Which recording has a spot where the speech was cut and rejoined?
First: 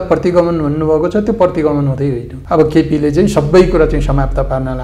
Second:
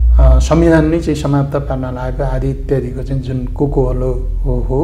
first; 1 cut; at 2.3 s

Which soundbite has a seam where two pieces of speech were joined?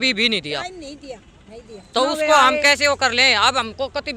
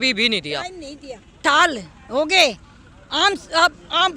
second; 1 cut; at 1.4 s

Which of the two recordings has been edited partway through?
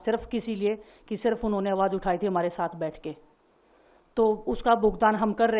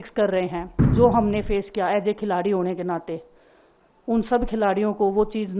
second; 1 cut; at 0.9 s

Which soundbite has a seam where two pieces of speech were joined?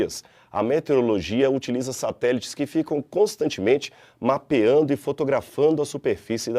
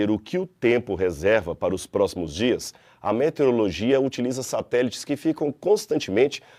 first; 1 cut; at 5.1 s

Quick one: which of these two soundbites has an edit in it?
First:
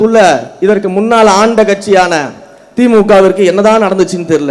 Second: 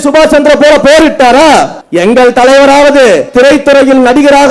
second; 2 cuts; at 1.8 s, 3.3 s

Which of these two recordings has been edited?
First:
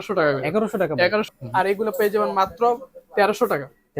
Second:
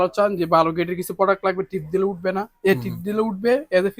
first; 1 cut; at 1.3 s

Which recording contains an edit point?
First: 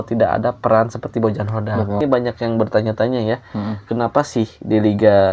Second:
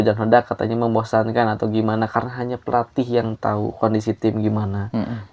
first; 1 cut; at 2.0 s

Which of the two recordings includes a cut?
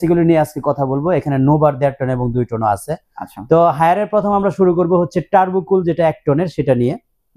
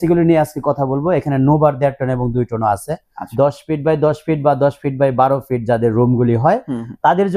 second; 1 cut; at 3.2 s

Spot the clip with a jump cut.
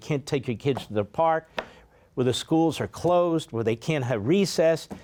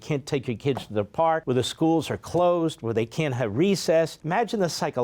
second; 2 cuts; at 1.4 s, 4.2 s

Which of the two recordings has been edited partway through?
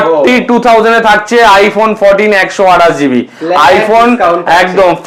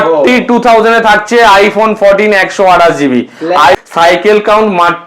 second; 1 cut; at 3.8 s

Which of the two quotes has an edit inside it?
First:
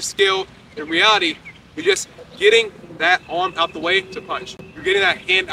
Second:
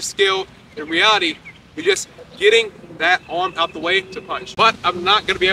second; 1 cut; at 4.4 s

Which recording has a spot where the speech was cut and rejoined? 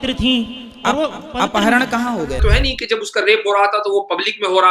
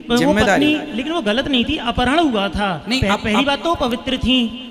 first; 1 cut; at 2.4 s

